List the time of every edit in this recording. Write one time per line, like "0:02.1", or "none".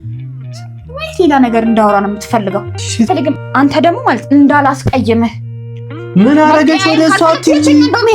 0:03.1